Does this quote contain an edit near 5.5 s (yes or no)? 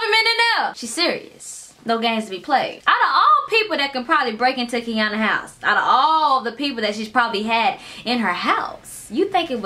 no